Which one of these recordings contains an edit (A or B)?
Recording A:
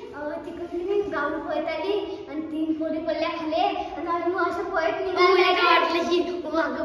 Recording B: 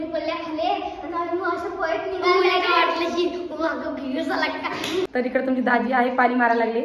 B